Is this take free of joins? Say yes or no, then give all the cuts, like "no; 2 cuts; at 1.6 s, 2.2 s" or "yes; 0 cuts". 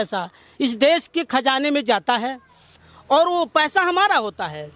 yes; 0 cuts